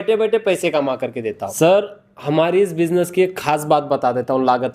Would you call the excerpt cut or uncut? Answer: cut